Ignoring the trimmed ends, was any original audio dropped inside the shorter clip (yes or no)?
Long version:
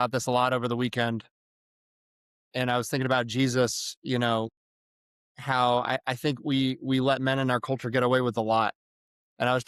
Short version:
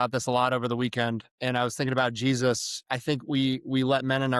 yes